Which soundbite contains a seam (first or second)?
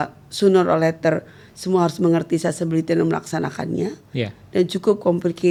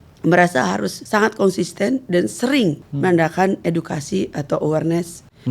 second